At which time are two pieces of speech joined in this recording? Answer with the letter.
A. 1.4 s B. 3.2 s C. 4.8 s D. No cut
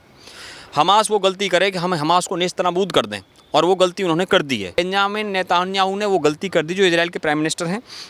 C